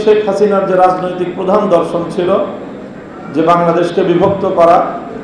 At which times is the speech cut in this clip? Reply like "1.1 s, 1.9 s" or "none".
none